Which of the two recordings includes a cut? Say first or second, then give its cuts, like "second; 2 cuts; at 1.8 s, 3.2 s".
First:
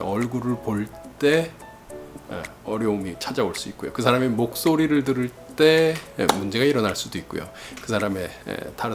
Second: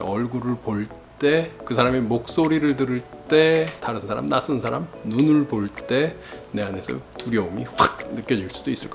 second; 2 cuts; at 1.6 s, 3.8 s